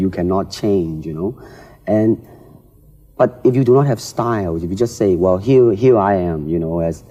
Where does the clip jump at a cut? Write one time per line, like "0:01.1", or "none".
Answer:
none